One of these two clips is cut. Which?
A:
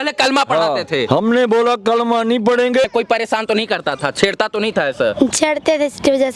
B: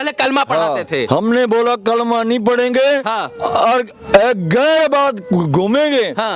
A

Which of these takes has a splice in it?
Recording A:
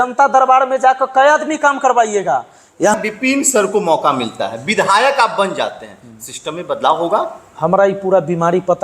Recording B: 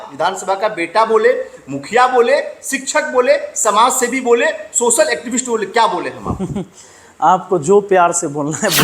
A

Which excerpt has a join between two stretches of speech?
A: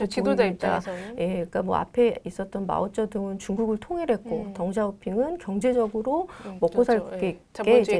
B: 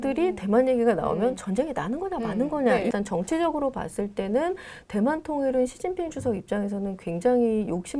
B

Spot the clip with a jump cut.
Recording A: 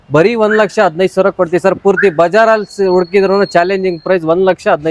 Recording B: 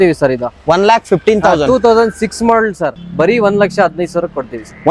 B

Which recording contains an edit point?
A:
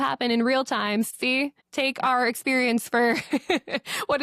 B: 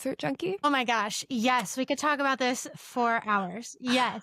A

